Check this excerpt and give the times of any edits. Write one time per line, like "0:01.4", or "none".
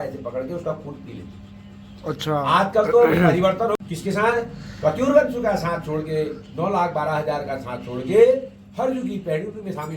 0:03.8